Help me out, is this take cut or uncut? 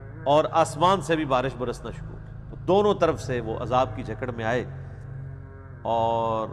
uncut